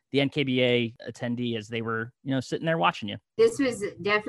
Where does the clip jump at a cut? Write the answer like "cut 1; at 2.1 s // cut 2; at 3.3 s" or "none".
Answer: cut 1; at 1.0 s // cut 2; at 3.4 s